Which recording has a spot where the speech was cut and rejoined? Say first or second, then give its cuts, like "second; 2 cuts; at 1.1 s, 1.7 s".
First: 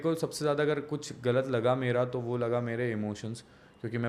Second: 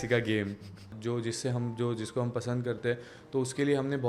second; 1 cut; at 0.9 s